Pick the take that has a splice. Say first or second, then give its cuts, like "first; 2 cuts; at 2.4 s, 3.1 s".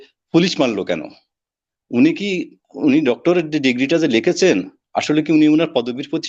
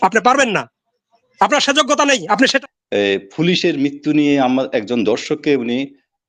second; 1 cut; at 2.4 s